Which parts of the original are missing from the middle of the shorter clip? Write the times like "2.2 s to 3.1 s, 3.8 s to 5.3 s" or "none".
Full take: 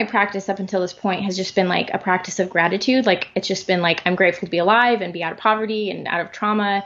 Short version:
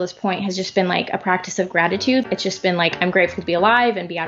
3.0 s to 3.3 s